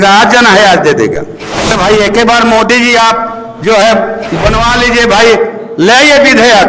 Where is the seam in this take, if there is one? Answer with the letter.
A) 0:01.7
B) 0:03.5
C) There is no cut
A